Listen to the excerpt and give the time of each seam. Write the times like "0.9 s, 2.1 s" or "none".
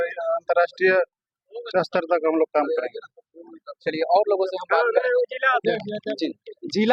none